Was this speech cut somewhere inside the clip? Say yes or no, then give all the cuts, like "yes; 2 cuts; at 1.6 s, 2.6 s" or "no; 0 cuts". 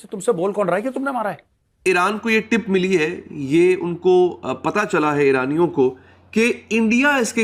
yes; 1 cut; at 1.8 s